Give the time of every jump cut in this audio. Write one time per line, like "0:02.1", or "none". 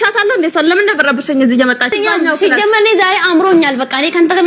0:01.9

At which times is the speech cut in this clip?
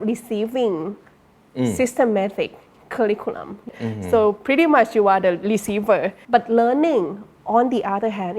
0:03.7
0:06.2

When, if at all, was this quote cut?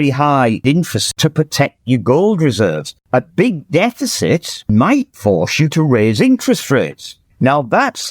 0:00.8
0:02.9
0:04.7

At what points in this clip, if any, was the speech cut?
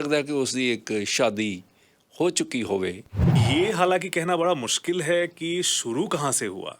0:03.4

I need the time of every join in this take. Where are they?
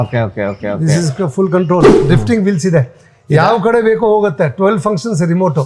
0:02.0

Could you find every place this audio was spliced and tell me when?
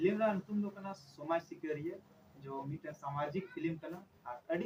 none

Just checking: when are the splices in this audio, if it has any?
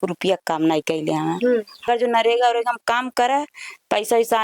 0:01.8

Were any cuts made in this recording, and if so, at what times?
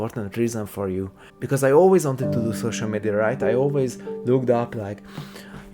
0:01.1

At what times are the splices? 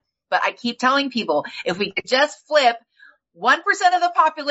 none

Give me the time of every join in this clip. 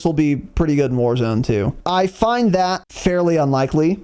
0:01.8
0:02.9

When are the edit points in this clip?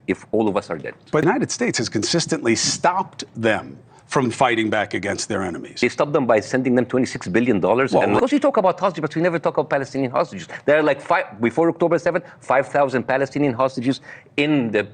0:01.2
0:05.8
0:08.2

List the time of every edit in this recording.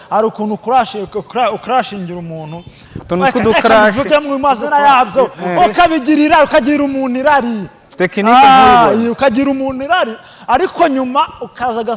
none

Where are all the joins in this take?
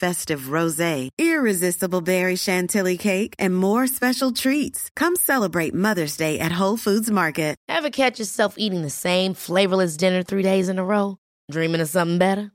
0:07.6

